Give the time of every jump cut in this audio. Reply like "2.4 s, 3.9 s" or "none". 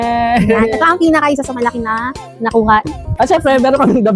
3.0 s